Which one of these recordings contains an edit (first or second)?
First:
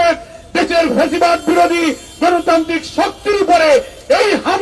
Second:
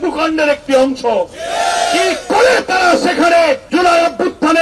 second